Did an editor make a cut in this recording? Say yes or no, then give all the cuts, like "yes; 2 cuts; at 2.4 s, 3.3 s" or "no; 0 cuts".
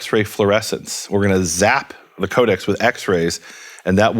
yes; 1 cut; at 2.2 s